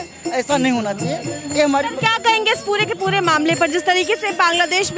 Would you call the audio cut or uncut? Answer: uncut